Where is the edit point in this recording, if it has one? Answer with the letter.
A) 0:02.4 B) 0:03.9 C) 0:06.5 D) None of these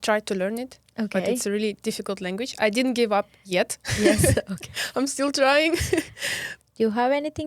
C